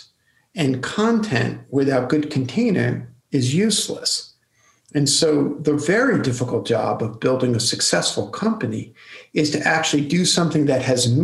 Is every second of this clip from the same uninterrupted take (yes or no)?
yes